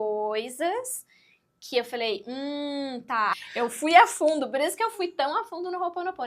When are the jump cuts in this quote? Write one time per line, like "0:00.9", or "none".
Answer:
0:03.3